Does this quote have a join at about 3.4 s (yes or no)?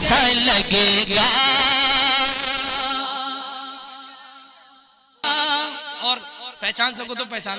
no